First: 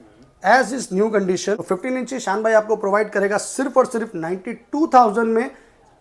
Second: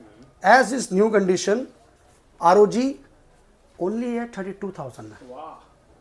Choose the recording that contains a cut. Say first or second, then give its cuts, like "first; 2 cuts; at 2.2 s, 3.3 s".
first; 1 cut; at 1.6 s